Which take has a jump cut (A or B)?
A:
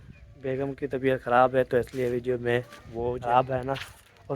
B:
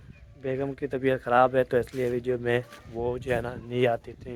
A